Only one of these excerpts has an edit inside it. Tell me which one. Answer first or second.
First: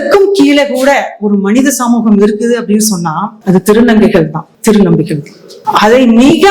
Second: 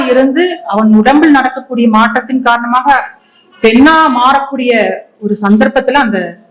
first